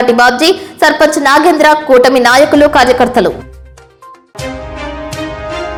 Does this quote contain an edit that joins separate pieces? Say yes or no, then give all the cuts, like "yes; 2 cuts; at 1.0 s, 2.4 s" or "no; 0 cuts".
no; 0 cuts